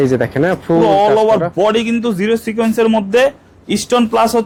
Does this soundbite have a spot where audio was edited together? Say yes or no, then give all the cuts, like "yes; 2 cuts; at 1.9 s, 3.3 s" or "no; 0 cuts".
no; 0 cuts